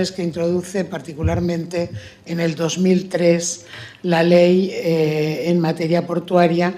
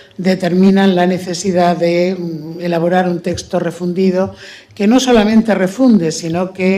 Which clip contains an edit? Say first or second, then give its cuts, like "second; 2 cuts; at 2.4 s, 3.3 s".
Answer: first; 1 cut; at 3.7 s